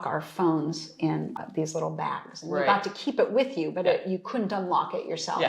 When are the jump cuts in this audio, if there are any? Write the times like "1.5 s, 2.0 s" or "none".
1.3 s

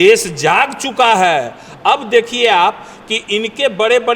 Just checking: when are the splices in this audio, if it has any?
none

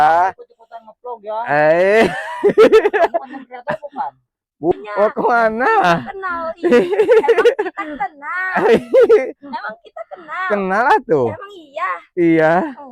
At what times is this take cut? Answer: 4.7 s

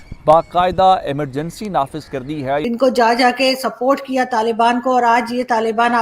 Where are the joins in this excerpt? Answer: 2.6 s

